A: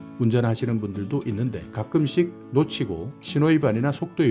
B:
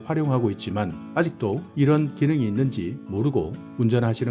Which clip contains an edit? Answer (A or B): A